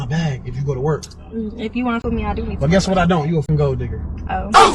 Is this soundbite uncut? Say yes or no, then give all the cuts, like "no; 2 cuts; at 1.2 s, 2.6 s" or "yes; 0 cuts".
no; 2 cuts; at 2.0 s, 3.5 s